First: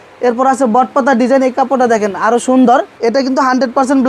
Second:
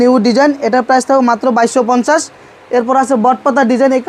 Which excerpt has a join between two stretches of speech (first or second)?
first